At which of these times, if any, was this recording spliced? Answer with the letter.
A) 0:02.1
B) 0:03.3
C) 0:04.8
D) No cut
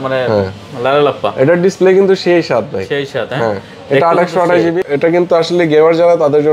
C